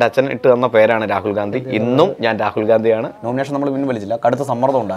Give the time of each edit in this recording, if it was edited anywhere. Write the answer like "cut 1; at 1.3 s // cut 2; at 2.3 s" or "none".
cut 1; at 3.1 s

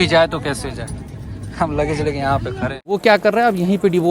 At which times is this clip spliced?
cut 1; at 3.0 s

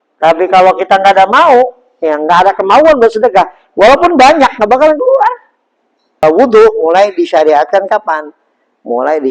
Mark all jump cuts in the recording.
cut 1; at 6.2 s

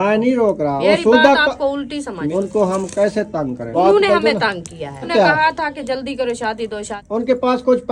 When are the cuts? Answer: cut 1; at 0.8 s // cut 2; at 2.2 s // cut 3; at 3.7 s // cut 4; at 5.1 s // cut 5; at 7.0 s

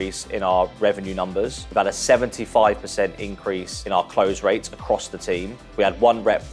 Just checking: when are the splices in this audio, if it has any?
cut 1; at 1.6 s // cut 2; at 3.7 s // cut 3; at 5.6 s

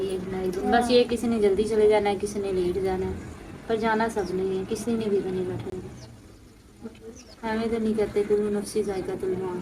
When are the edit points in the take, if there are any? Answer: none

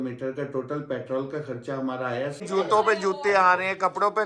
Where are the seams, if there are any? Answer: cut 1; at 2.4 s

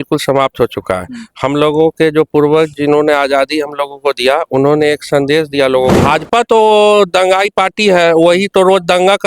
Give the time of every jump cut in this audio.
cut 1; at 6.0 s

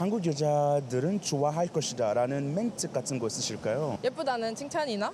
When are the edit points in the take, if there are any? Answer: cut 1; at 4.0 s

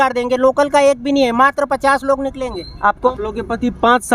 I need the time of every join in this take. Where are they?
cut 1; at 3.1 s

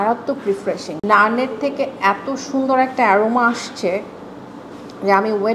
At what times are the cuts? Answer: cut 1; at 1.0 s

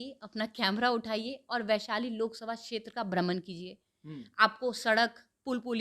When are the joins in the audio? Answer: none

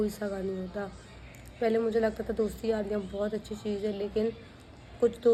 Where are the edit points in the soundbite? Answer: none

